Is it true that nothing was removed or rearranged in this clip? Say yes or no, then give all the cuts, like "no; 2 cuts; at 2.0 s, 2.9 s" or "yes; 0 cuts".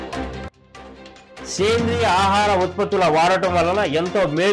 no; 1 cut; at 1.0 s